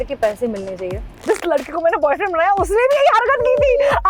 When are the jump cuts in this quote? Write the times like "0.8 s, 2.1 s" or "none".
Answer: 1.2 s